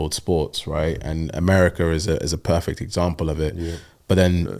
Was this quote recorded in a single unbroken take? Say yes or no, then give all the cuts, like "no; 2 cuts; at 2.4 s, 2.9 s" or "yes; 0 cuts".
yes; 0 cuts